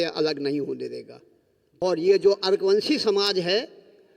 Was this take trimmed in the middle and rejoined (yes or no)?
yes